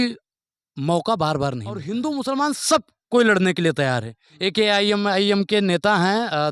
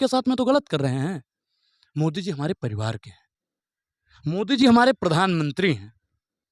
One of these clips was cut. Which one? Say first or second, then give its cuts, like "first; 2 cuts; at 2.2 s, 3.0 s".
first; 1 cut; at 1.8 s